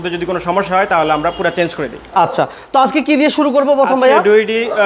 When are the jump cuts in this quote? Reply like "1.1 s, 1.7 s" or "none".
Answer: none